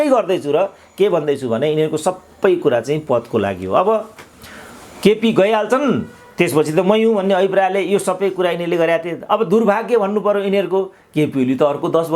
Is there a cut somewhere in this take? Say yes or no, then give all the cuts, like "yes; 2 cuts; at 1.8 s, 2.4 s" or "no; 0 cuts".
no; 0 cuts